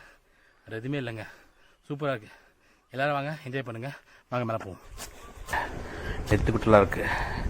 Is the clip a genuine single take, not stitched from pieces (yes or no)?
no